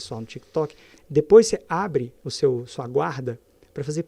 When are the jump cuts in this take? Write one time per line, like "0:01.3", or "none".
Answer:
0:00.9
0:02.2

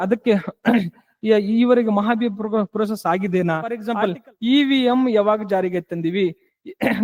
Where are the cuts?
0:03.9

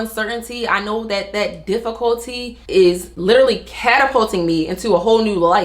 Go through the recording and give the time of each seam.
0:03.1

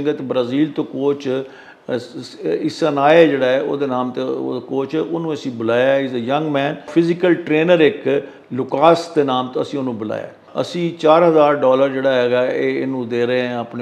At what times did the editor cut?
0:06.9
0:10.4

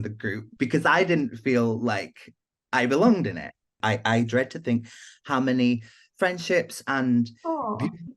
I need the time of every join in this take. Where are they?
0:03.7

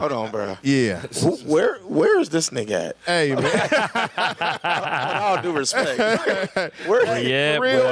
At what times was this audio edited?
none

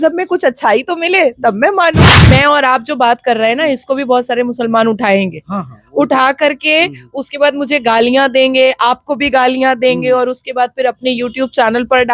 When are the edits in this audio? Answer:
0:02.2

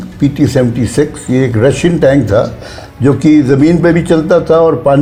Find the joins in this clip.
none

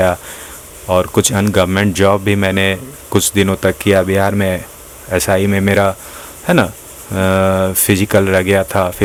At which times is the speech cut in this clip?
none

